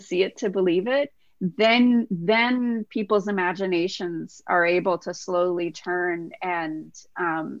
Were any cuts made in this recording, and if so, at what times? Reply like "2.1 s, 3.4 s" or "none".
none